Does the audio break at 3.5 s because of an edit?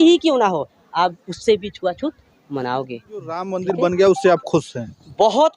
yes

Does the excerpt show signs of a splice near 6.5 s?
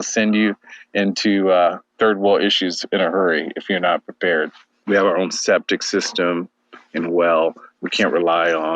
no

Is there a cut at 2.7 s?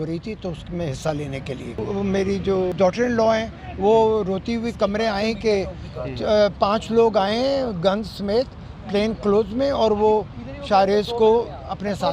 yes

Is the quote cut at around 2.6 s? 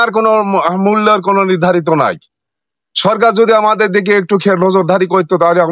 no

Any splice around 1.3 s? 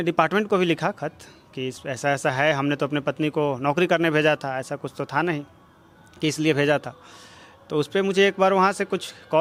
no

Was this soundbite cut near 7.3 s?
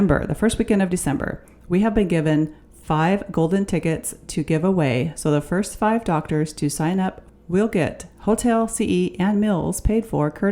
yes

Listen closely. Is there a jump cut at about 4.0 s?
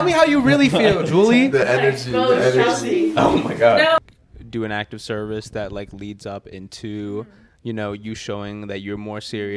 yes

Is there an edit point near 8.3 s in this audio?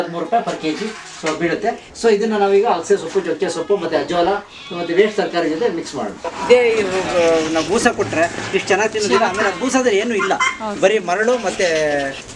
no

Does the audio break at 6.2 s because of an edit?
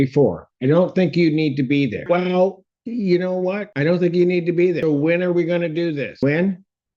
yes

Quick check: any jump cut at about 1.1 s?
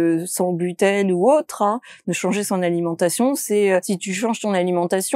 no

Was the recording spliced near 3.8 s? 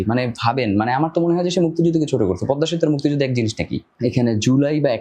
yes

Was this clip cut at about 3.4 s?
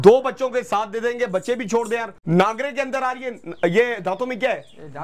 no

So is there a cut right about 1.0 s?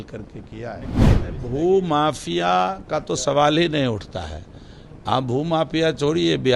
yes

